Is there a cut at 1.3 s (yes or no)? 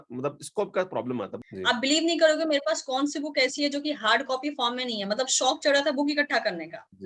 yes